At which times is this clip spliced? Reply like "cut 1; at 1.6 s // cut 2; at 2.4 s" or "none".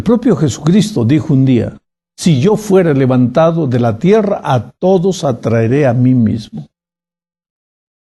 none